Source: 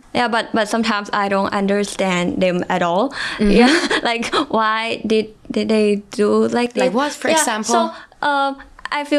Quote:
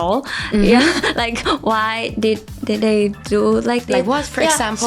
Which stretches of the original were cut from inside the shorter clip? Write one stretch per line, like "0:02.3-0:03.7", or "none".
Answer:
none

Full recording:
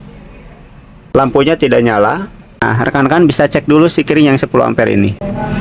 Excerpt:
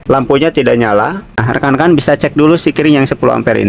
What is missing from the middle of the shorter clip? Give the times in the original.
0:02.4-0:02.6

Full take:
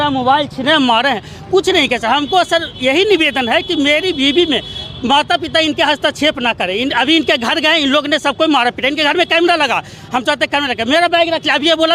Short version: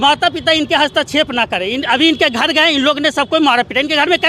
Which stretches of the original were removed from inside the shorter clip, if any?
none

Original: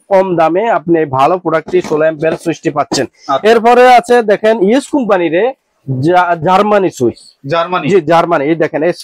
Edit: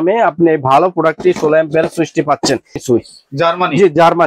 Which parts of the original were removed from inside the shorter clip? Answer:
0:03.3-0:06.9

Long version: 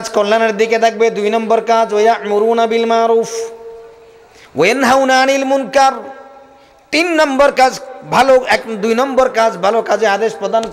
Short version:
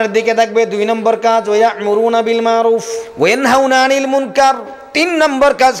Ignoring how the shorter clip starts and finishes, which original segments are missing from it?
0:03.4-0:04.4
0:06.1-0:06.7

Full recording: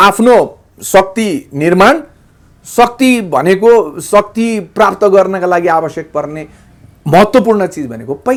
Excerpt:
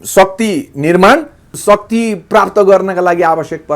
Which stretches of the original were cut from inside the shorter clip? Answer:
0:02.3-0:04.0

